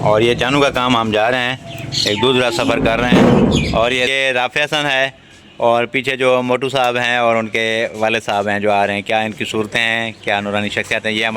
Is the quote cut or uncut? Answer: cut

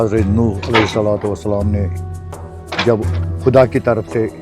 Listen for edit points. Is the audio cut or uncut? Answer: cut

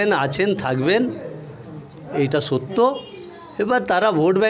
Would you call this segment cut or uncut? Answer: uncut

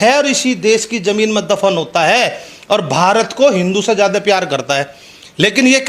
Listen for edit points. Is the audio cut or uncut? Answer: uncut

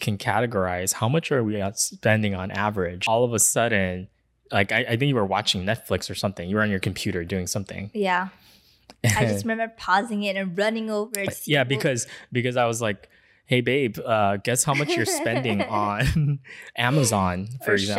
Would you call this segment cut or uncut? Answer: cut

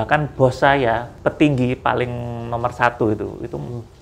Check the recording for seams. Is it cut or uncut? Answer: cut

